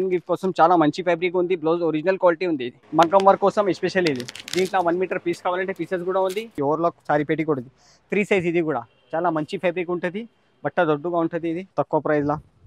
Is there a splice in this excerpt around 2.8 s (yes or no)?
yes